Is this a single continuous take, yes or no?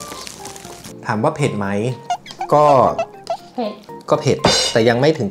yes